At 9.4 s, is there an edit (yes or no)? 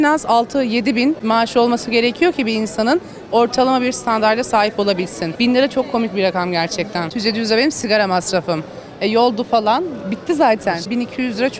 no